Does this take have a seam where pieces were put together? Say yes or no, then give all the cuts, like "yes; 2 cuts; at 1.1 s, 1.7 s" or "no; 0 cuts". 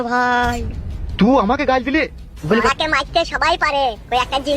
yes; 1 cut; at 2.6 s